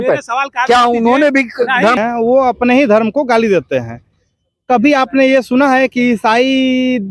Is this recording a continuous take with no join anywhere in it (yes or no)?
no